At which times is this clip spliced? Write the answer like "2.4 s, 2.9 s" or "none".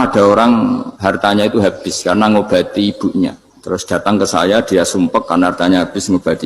0.9 s, 3.5 s